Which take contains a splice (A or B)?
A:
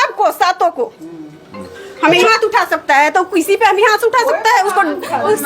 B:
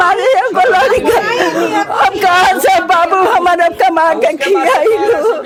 A